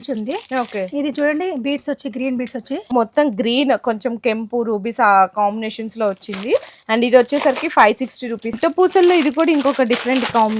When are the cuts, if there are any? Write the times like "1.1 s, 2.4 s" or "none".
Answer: 2.9 s, 8.6 s